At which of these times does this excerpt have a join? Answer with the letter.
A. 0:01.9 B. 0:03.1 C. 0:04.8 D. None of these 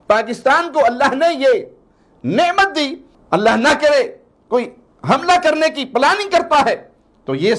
B